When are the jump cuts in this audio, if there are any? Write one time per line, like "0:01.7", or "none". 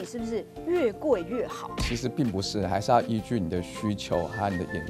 none